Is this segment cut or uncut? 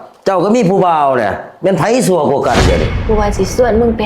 cut